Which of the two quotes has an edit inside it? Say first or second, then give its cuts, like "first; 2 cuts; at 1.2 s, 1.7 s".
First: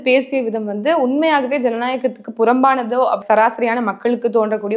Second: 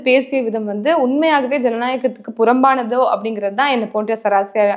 first; 1 cut; at 3.2 s